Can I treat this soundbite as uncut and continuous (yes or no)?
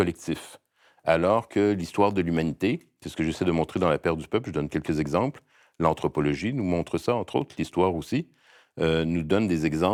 yes